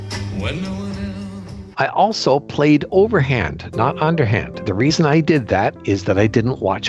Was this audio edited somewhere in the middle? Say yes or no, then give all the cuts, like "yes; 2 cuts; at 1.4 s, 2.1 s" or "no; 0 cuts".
yes; 2 cuts; at 1.6 s, 4.6 s